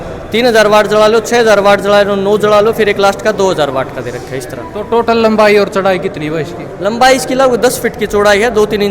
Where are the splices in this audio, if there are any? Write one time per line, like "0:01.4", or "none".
none